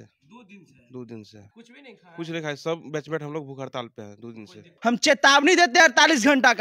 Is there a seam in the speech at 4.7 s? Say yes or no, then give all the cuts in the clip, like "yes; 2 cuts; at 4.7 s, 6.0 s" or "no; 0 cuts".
yes; 2 cuts; at 1.4 s, 4.7 s